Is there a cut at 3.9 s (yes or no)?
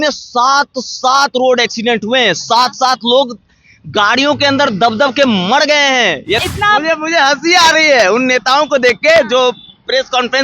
no